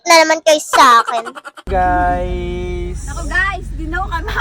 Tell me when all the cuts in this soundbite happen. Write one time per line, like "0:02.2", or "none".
0:01.7